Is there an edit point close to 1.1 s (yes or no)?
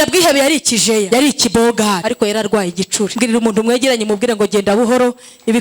yes